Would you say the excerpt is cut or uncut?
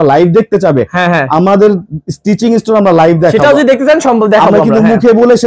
uncut